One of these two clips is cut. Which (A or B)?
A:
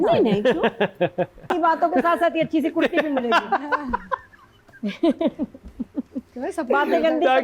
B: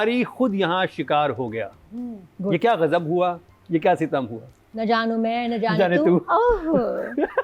A